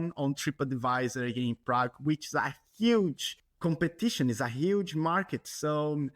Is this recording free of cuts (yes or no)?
yes